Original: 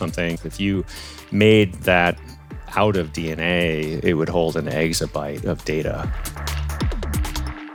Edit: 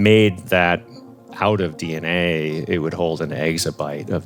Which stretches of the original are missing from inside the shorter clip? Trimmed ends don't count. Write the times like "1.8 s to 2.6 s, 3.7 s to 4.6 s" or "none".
none